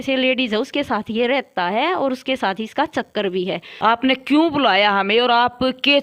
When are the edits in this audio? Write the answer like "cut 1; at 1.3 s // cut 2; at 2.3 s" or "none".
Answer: cut 1; at 3.6 s